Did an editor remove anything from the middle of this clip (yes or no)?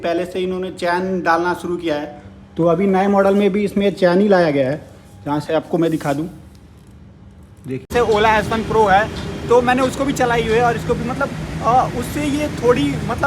yes